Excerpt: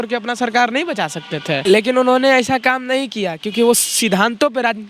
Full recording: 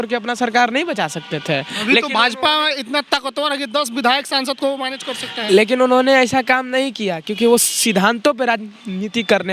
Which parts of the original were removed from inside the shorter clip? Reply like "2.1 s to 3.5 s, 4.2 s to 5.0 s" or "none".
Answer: 1.6 s to 5.4 s